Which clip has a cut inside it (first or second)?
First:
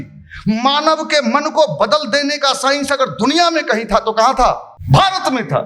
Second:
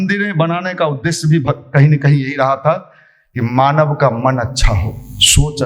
first